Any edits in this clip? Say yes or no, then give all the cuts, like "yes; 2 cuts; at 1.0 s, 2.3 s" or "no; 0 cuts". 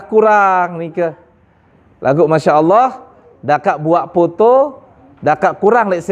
no; 0 cuts